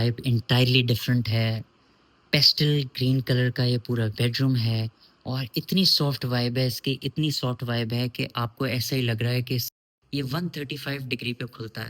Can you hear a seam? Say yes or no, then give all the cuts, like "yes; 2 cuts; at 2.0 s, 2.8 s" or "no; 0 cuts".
yes; 1 cut; at 9.7 s